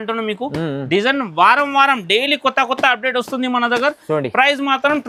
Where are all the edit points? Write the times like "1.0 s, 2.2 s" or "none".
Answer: none